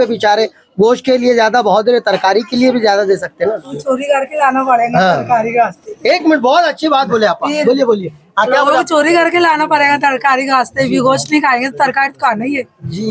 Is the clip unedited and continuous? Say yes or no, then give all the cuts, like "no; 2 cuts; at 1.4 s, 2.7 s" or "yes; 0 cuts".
yes; 0 cuts